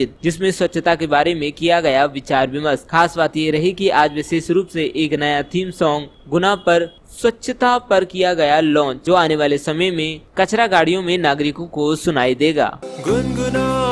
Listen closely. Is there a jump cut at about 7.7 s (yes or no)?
no